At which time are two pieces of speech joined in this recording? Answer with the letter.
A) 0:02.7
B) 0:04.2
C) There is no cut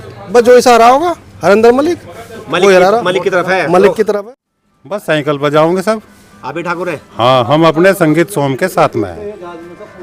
B